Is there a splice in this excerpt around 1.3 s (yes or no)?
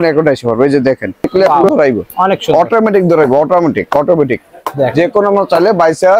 yes